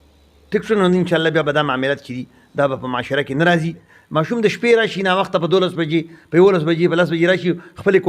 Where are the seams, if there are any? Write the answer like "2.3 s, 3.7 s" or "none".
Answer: 3.7 s